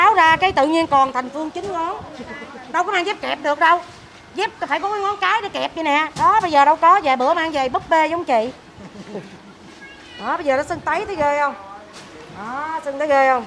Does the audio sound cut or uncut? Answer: uncut